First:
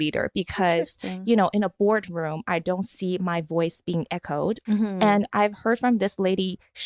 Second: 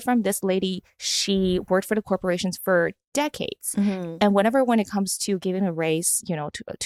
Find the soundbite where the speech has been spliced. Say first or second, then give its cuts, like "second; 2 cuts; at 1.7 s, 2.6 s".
first; 1 cut; at 4.6 s